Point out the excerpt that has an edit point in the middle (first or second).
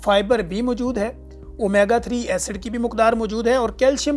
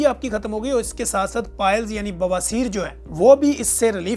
second